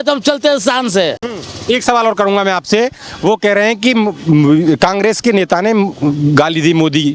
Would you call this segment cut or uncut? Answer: uncut